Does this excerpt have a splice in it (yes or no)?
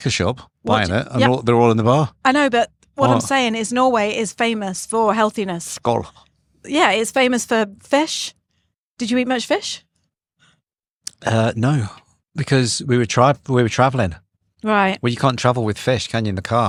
no